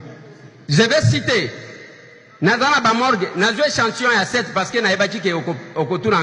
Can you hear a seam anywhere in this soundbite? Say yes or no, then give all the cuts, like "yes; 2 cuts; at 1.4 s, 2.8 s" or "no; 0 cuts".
no; 0 cuts